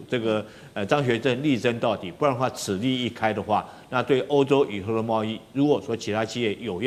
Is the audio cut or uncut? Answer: uncut